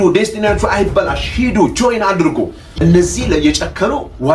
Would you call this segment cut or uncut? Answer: cut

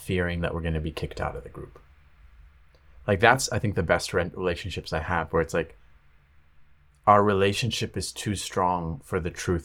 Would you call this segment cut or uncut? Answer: uncut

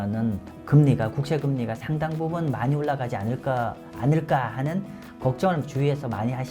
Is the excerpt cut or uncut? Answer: uncut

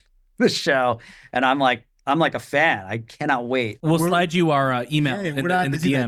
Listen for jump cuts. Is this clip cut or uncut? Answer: uncut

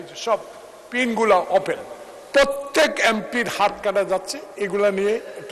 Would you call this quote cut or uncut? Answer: uncut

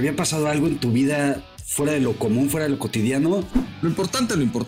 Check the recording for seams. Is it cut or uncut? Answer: cut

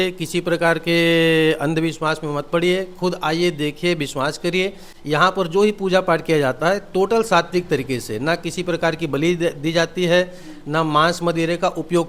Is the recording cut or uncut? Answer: uncut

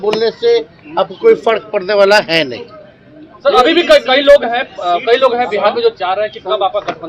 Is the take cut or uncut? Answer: uncut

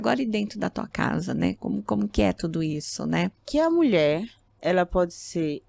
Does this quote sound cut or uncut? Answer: cut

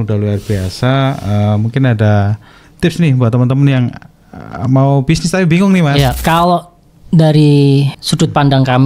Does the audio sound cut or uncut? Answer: cut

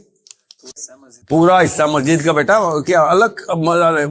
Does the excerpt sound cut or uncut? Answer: uncut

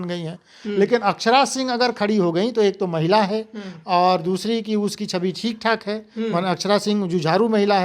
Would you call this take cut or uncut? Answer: uncut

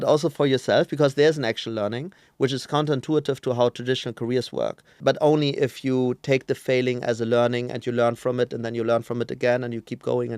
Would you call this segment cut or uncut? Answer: cut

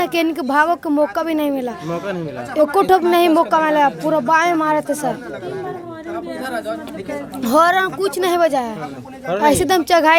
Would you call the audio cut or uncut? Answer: uncut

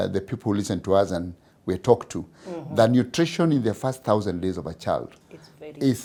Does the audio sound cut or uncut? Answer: uncut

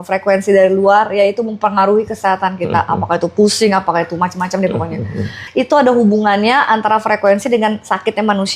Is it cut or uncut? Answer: cut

